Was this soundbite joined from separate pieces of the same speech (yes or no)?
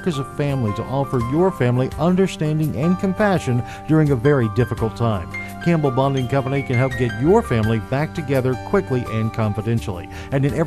no